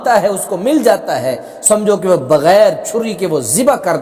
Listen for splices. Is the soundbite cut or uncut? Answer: uncut